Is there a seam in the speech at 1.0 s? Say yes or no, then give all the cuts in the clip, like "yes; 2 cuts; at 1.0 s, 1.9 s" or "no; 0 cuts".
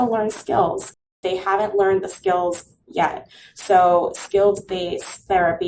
yes; 1 cut; at 1.0 s